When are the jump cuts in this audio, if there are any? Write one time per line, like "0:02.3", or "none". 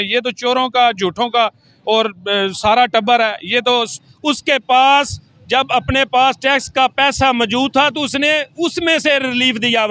0:03.9